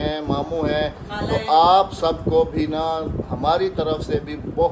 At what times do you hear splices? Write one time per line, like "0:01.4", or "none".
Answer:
none